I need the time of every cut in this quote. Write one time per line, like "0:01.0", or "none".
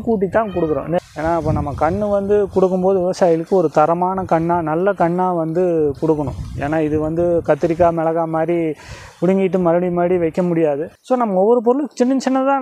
0:01.0
0:10.9